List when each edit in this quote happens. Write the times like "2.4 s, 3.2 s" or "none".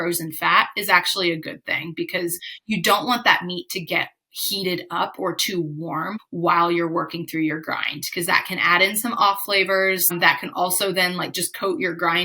6.2 s, 10.1 s